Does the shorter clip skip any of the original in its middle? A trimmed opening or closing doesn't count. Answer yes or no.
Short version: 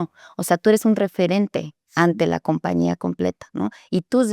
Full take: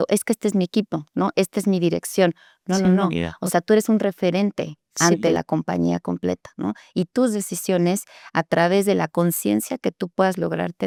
no